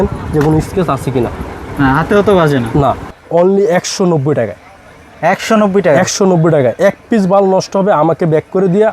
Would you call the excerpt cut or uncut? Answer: cut